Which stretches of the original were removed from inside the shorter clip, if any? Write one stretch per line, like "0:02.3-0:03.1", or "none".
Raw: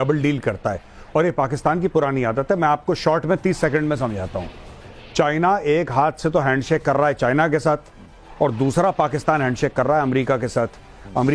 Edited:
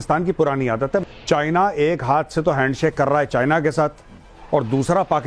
0:02.6-0:04.9